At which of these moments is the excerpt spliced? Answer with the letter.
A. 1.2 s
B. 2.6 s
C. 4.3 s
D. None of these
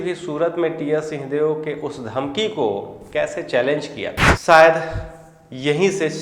C